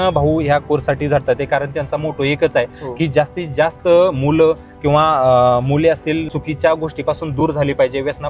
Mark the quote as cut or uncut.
cut